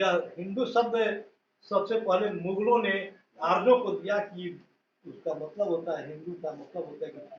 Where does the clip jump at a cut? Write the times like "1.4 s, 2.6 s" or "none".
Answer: none